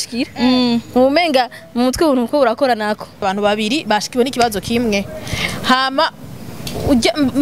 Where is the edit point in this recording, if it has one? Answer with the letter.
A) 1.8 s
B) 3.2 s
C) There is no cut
B